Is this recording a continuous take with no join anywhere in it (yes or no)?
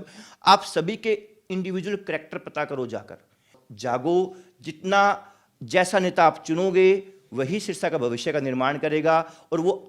no